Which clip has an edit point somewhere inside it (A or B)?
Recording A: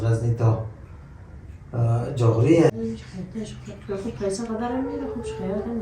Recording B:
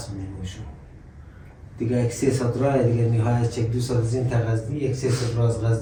A